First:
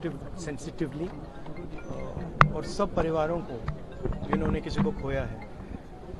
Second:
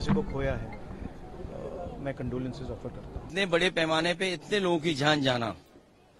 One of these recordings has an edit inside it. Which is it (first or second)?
second